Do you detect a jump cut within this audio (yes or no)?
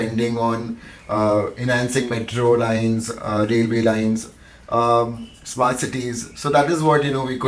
no